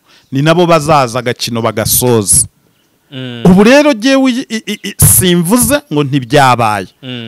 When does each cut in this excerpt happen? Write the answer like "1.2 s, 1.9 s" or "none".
none